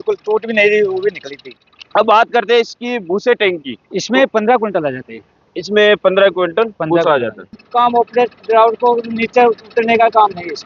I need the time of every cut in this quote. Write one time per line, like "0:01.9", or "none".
0:01.5
0:07.6